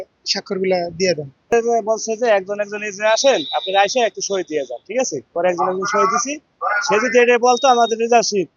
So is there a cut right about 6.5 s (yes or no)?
no